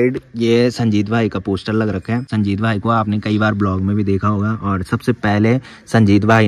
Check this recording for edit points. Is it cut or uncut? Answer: uncut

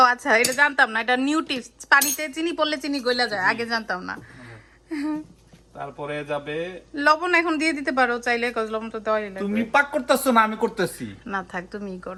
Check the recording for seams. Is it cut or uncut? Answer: uncut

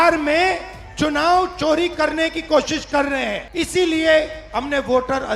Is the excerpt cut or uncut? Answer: cut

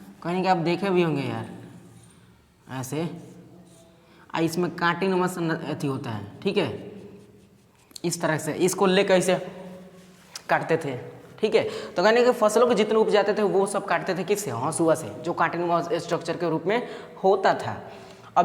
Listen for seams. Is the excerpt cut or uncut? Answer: uncut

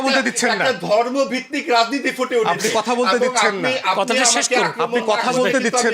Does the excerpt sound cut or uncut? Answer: uncut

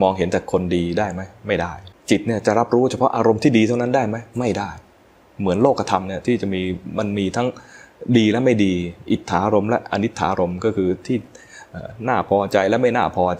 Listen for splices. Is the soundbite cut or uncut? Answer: cut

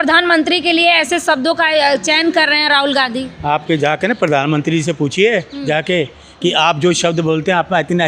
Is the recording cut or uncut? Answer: uncut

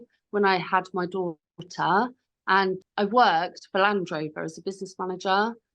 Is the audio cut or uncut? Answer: cut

